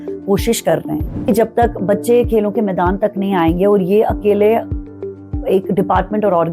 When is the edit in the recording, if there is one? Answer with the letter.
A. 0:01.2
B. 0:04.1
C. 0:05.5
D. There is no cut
A